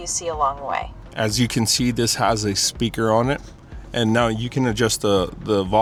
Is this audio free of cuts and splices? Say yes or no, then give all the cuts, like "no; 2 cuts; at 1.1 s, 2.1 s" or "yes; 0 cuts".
yes; 0 cuts